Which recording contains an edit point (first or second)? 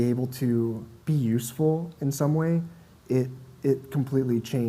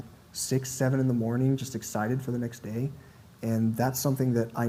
first